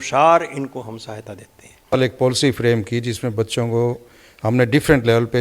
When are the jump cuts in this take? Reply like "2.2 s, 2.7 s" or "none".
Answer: 1.9 s

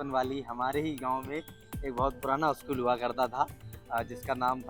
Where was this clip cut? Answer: none

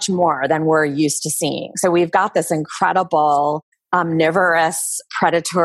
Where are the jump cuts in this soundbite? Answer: 3.7 s

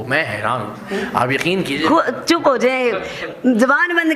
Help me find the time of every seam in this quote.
none

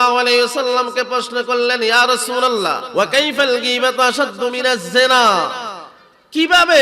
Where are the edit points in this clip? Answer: 2.8 s

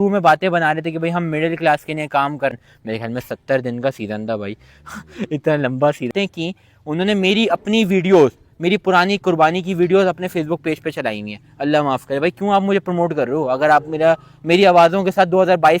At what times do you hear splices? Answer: 2.5 s, 6.1 s

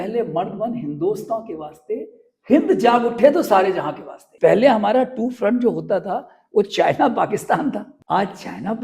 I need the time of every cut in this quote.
4.2 s

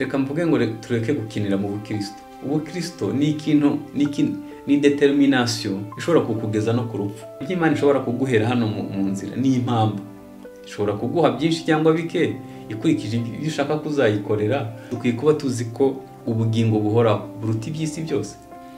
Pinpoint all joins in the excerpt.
7.5 s, 14.9 s

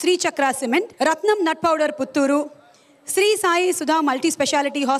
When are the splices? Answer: 0.9 s

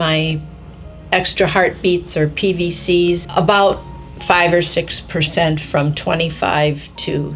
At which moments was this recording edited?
none

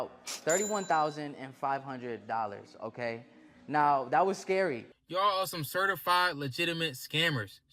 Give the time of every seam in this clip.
4.9 s

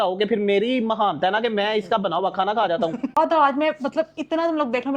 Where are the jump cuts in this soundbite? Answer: none

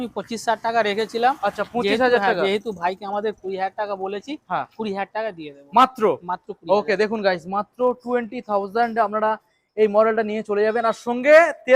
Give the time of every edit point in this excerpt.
none

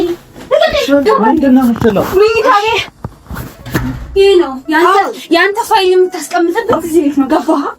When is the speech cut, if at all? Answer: 1.0 s

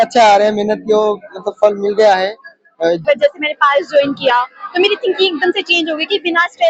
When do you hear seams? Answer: 3.0 s

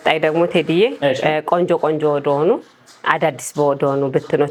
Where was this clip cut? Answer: none

